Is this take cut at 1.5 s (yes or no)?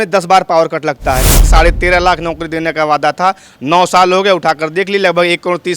yes